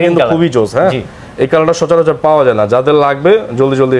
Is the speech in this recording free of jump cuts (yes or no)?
yes